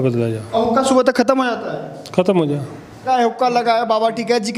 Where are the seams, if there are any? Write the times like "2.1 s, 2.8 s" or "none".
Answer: 3.0 s